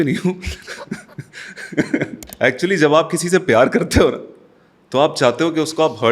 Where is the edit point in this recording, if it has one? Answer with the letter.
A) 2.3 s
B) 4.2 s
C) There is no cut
A